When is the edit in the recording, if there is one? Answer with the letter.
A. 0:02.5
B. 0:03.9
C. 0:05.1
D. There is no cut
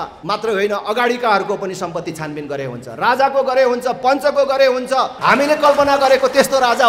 C